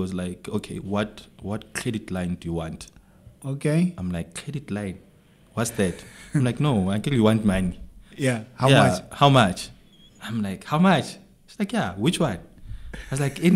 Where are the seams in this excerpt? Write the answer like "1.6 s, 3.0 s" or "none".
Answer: none